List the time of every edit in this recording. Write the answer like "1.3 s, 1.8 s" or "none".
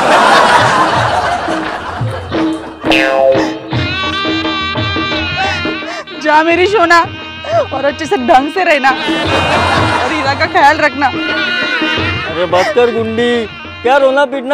none